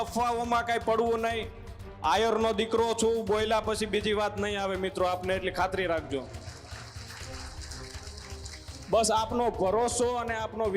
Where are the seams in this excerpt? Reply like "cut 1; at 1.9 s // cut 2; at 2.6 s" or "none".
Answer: none